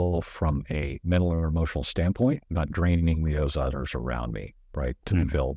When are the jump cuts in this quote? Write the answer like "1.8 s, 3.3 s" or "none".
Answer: 1.0 s, 2.5 s